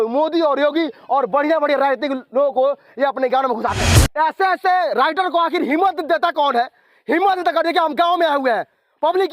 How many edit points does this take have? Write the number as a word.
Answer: one